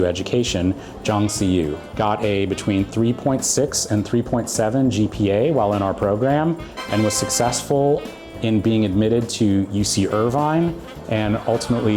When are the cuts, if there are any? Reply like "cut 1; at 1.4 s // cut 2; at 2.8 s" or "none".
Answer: cut 1; at 1.8 s